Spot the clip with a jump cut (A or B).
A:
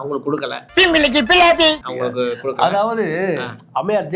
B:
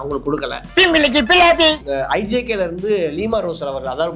B